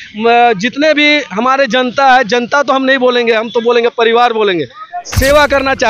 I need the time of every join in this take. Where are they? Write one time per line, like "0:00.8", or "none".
none